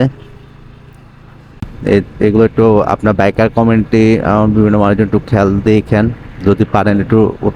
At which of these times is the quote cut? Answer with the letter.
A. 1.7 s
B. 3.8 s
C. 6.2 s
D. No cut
A